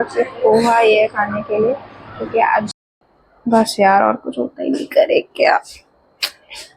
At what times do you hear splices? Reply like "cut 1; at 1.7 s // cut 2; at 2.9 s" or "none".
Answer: cut 1; at 2.8 s